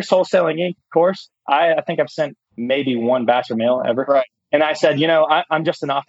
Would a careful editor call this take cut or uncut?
cut